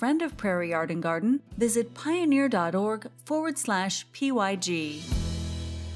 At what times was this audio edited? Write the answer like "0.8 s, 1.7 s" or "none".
5.0 s

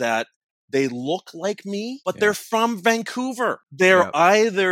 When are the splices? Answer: 2.0 s, 3.6 s

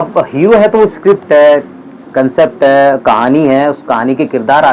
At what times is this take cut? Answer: none

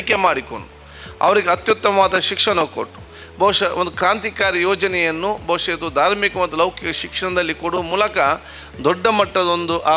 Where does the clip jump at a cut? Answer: none

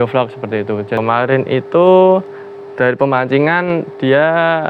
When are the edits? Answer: 1.0 s

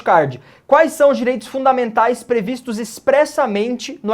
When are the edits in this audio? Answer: none

